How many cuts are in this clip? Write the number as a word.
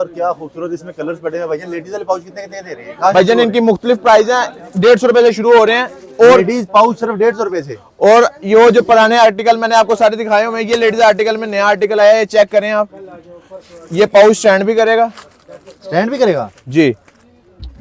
zero